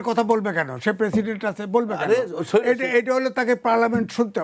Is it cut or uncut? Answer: uncut